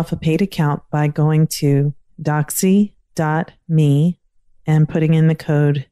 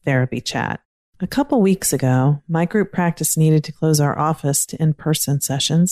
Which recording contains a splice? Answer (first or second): second